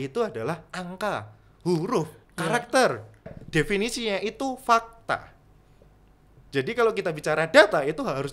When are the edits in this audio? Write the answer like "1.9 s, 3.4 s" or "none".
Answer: 3.3 s